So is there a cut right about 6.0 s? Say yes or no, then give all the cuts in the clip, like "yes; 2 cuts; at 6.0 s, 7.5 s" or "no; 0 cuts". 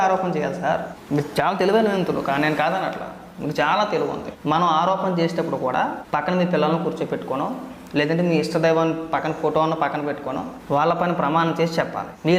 yes; 4 cuts; at 0.9 s, 4.3 s, 6.0 s, 10.5 s